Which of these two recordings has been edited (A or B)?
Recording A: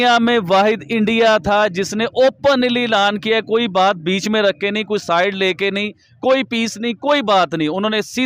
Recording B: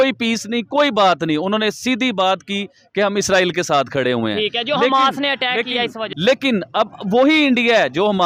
B